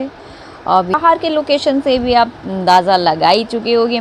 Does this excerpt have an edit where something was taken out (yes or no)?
yes